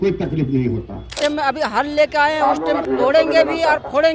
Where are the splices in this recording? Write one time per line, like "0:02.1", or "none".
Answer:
0:01.2
0:02.8